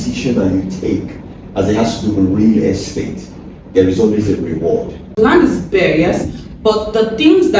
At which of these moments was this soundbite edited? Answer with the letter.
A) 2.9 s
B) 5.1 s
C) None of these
B